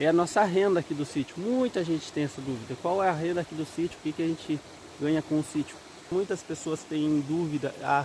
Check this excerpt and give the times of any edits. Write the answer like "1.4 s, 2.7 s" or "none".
6.0 s

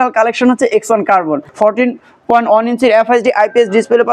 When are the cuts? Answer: 1.5 s

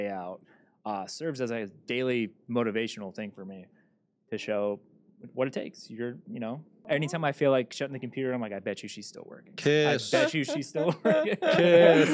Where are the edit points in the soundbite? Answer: 6.8 s

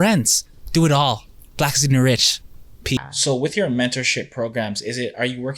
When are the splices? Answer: none

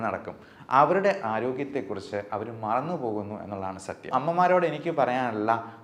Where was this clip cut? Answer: 4.1 s

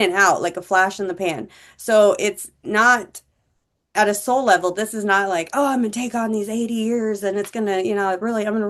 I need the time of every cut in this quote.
none

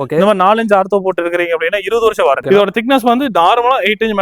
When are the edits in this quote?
2.4 s

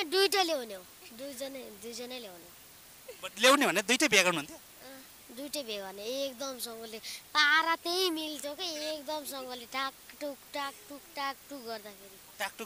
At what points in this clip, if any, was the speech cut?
none

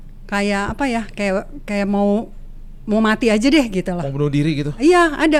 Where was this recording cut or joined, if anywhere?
none

